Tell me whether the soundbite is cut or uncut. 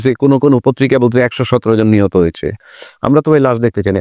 uncut